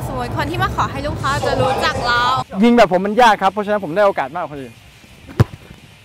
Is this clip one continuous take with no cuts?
no; 2 cuts; at 2.4 s, 4.8 s

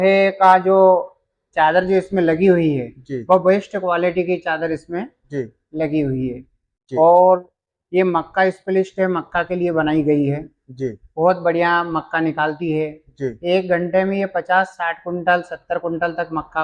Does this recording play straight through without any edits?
yes; 0 cuts

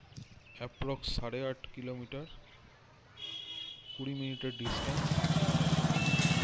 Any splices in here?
yes; 1 cut; at 4.9 s

